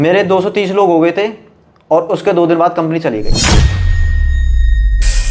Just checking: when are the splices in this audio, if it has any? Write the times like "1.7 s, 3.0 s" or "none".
none

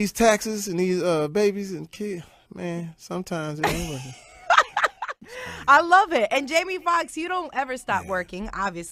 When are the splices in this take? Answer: 1.3 s

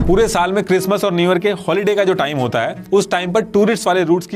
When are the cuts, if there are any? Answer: none

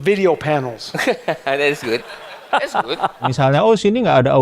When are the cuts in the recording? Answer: 3.3 s

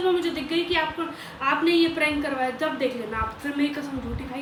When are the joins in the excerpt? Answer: none

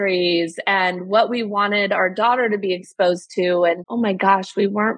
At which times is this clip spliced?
3.9 s

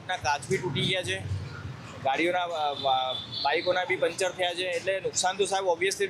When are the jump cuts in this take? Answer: none

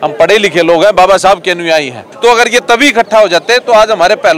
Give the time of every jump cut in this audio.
2.1 s

